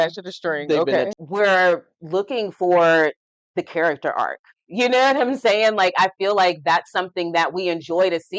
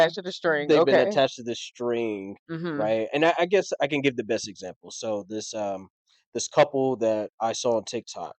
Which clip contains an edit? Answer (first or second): first